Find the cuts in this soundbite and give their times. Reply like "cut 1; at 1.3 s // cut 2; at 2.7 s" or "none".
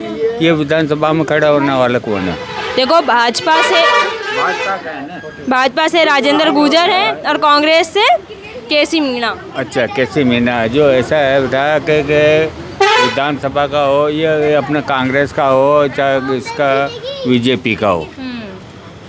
none

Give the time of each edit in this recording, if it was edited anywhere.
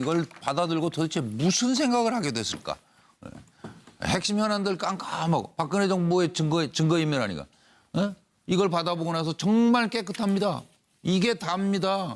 cut 1; at 3.3 s

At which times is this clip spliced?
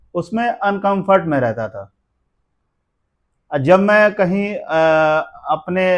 none

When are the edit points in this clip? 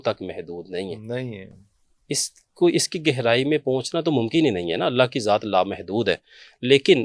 none

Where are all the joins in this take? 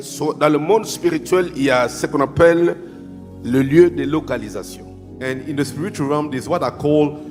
none

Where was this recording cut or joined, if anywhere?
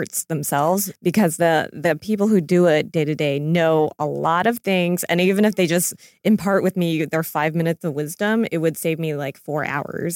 cut 1; at 0.9 s

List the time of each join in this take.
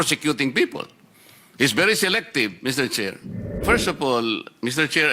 cut 1; at 3.6 s

